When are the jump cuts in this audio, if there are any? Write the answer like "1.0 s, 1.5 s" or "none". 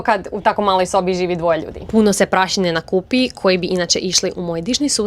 1.8 s